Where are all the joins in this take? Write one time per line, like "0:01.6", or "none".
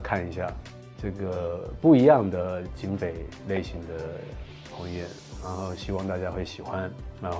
none